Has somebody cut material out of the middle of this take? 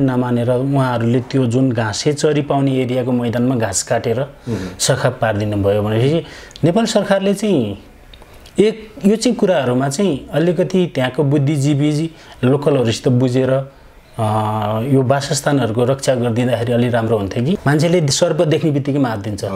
yes; 1 cut; at 17.6 s

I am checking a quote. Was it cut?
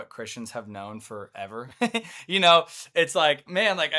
no; 0 cuts

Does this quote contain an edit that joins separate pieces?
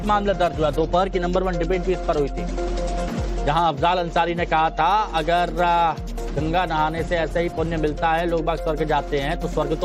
yes; 1 cut; at 1.3 s

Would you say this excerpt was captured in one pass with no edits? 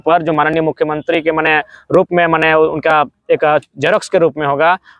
yes; 0 cuts

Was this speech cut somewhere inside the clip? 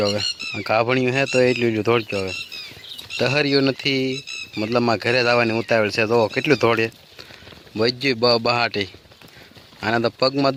no; 0 cuts

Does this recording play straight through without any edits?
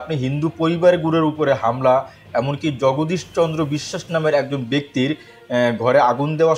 yes; 0 cuts

